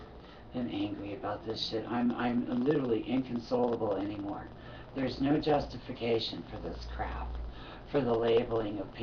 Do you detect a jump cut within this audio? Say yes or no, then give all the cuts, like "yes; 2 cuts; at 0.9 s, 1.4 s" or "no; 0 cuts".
yes; 1 cut; at 5.8 s